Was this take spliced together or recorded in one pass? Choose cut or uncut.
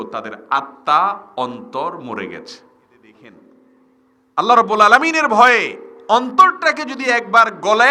cut